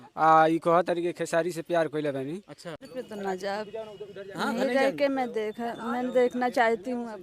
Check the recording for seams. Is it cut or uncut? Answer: cut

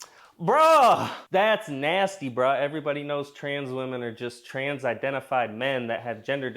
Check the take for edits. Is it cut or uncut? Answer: cut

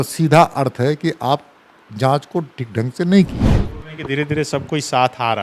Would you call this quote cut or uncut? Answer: cut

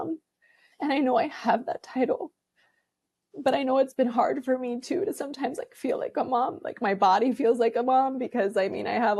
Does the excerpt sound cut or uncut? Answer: uncut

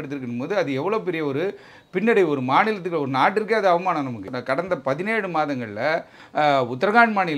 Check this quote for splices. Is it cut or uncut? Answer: cut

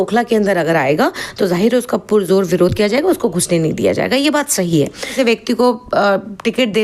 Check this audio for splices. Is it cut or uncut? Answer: cut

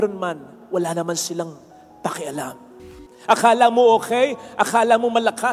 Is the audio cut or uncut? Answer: cut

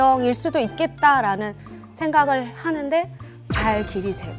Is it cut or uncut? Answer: uncut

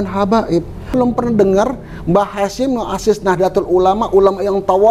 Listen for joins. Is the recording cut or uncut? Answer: cut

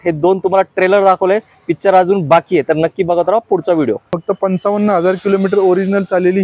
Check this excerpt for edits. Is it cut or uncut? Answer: cut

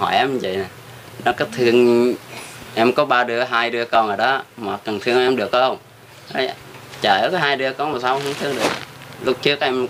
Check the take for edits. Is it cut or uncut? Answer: uncut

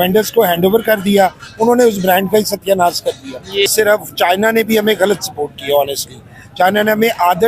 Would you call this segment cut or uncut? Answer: cut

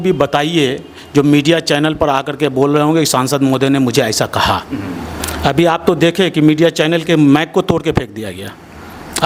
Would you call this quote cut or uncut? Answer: uncut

